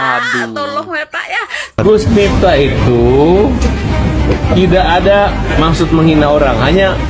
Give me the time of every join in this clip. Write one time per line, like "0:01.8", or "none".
0:01.8